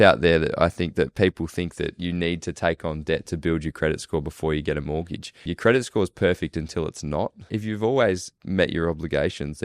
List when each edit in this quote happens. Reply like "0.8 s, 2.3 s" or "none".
5.5 s, 7.4 s, 8.3 s